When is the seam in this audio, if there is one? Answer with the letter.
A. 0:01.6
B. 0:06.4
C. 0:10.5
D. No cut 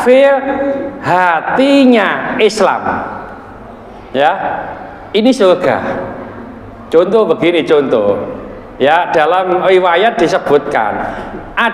D